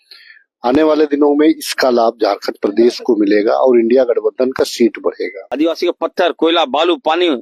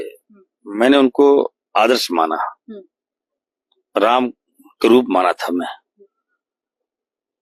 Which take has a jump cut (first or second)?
first